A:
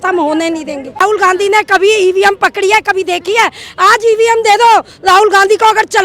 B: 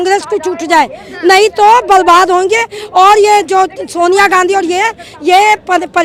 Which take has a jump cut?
A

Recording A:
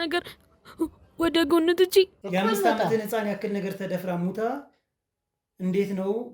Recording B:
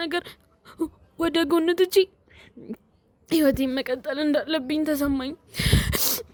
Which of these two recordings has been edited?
A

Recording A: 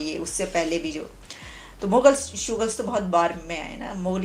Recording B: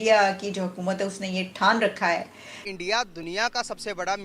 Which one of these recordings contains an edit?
B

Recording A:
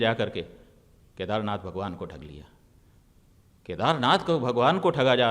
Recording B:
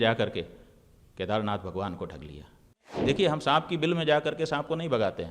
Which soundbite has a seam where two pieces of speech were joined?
B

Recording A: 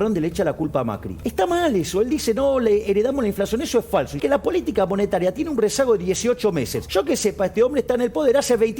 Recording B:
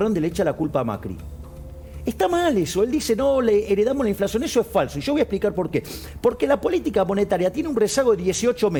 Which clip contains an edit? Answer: A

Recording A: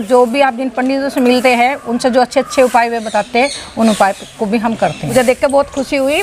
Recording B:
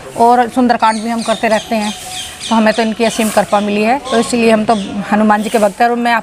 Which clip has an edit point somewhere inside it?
A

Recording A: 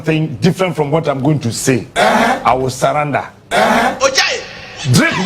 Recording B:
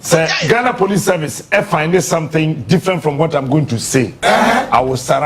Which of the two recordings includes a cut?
A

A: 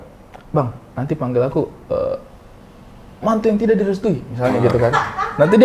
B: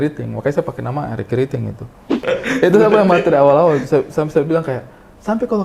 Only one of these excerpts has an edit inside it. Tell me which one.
B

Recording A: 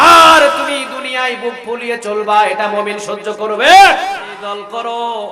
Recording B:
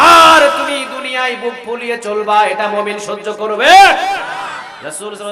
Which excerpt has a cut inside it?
A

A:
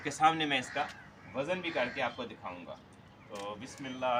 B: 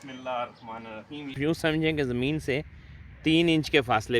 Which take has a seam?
B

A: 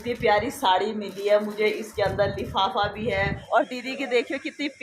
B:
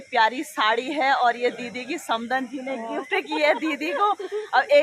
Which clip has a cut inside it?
A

